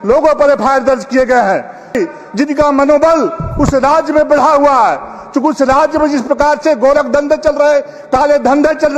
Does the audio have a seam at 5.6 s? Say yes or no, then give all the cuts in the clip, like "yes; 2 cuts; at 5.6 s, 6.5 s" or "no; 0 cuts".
no; 1 cut; at 2.0 s